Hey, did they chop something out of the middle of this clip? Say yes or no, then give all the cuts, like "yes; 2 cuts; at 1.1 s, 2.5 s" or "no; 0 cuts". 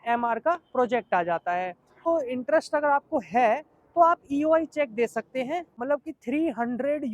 yes; 2 cuts; at 2.1 s, 5.7 s